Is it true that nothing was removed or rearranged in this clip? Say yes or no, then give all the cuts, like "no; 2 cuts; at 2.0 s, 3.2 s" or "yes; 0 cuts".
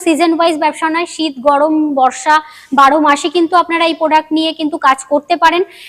yes; 0 cuts